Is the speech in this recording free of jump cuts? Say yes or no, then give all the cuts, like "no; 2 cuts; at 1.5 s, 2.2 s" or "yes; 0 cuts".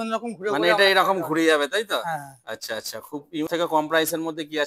no; 1 cut; at 3.5 s